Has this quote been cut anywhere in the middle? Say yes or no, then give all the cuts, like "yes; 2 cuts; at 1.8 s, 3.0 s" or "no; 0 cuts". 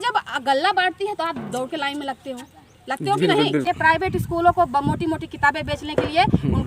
yes; 1 cut; at 3.6 s